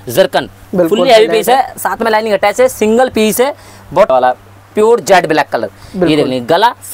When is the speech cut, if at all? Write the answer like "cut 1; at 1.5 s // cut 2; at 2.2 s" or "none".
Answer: cut 1; at 4.1 s